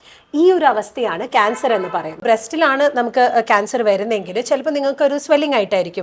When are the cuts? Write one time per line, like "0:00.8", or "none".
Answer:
0:02.2